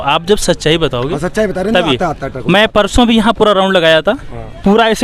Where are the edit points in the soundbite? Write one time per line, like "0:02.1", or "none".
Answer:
none